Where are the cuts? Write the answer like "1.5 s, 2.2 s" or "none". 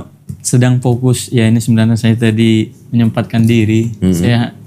none